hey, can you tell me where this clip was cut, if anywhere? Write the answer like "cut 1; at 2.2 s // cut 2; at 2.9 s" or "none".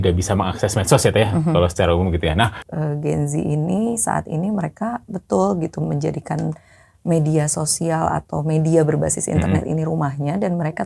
cut 1; at 2.6 s